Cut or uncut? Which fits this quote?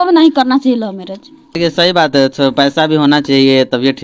cut